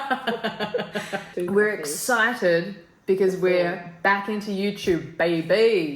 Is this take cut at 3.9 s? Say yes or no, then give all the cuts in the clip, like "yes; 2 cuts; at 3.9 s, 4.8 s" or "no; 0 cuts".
no; 1 cut; at 1.2 s